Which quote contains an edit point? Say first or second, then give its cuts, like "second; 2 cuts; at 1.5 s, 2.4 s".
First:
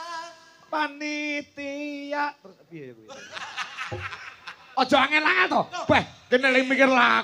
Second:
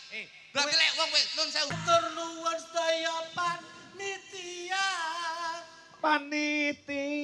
second; 1 cut; at 1.8 s